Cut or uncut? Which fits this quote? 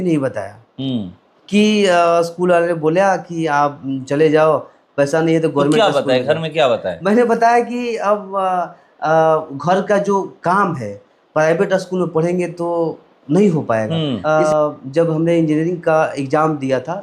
cut